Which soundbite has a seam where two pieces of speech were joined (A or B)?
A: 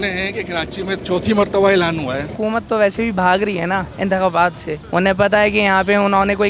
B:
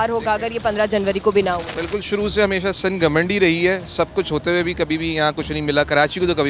A